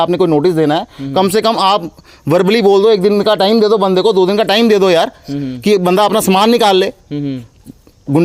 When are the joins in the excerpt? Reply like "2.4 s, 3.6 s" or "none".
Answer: none